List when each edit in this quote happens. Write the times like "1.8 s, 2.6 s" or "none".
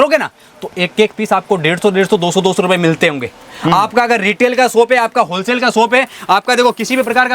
none